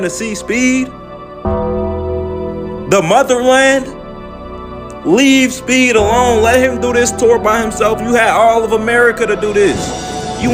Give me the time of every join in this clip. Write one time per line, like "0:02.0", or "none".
none